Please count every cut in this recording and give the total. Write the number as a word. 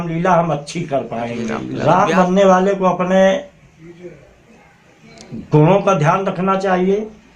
one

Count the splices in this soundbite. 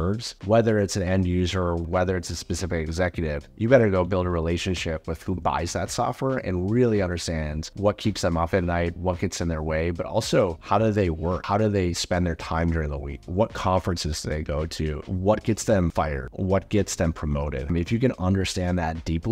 one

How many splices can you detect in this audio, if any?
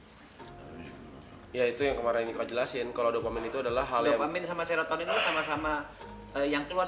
zero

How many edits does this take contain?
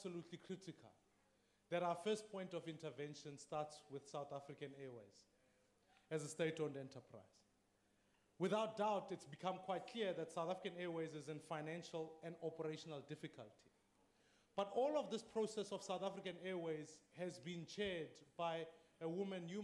zero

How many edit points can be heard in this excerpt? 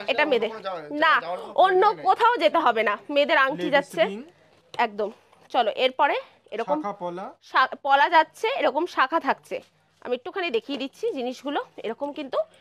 zero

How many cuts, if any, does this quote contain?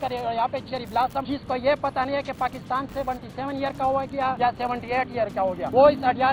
zero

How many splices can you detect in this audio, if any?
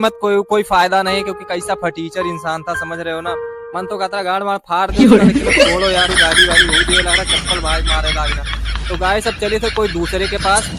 zero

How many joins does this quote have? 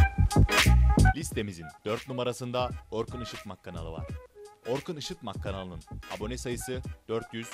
one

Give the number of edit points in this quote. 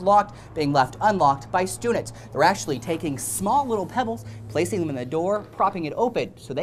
zero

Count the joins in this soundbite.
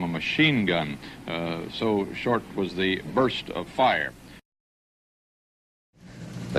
zero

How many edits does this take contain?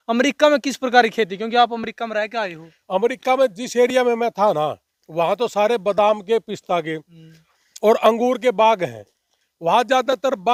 zero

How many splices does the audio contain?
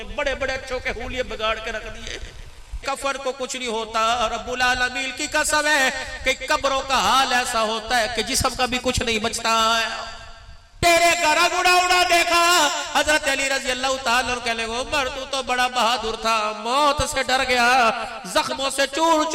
two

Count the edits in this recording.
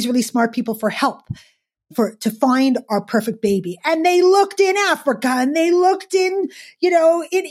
zero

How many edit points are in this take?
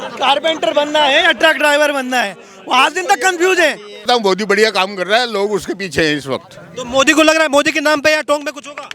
one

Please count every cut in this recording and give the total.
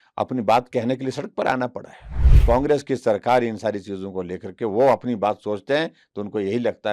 one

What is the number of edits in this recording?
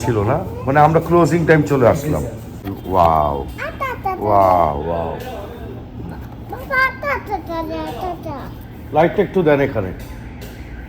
one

